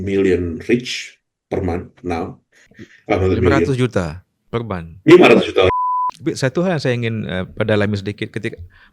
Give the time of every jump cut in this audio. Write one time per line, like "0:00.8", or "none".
0:05.7